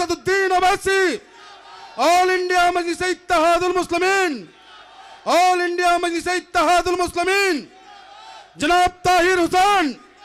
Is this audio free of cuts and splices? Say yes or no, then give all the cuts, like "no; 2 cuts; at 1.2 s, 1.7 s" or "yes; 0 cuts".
yes; 0 cuts